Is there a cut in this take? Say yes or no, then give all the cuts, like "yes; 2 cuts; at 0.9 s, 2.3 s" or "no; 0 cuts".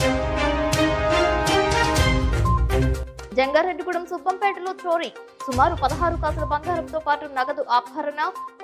no; 0 cuts